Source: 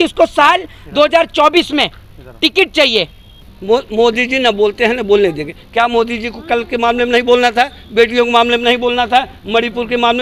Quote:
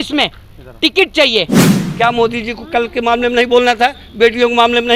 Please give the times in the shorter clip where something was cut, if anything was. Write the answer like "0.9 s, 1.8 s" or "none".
1.8 s